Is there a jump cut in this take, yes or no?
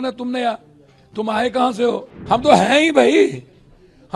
yes